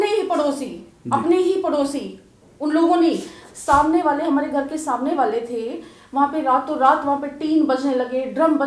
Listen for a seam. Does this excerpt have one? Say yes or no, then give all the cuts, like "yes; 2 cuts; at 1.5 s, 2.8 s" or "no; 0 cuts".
no; 0 cuts